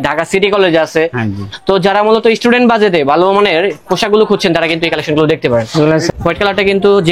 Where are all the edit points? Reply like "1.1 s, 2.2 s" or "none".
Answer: 6.1 s